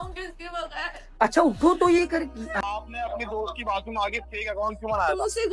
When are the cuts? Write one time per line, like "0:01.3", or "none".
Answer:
0:02.6